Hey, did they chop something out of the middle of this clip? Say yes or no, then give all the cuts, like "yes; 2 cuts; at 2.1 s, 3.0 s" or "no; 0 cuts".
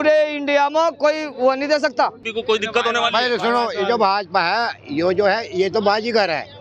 yes; 1 cut; at 2.3 s